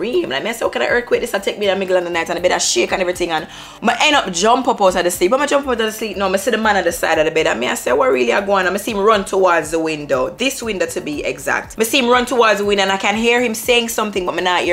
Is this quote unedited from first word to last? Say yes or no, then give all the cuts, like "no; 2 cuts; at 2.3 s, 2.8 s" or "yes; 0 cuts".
yes; 0 cuts